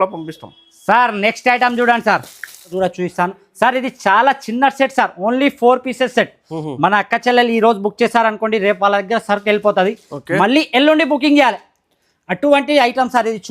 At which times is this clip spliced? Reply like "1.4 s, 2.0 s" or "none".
2.7 s